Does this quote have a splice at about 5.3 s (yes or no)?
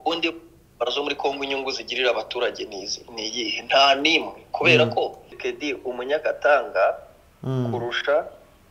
yes